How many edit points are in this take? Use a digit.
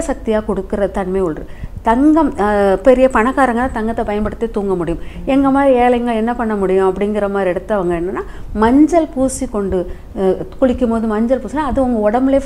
0